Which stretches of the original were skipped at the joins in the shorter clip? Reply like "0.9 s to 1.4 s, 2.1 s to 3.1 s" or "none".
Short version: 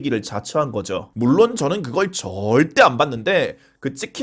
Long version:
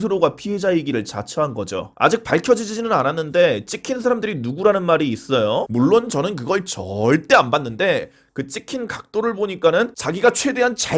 1.9 s to 5.7 s